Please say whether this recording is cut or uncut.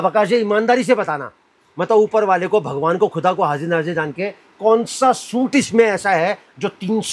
uncut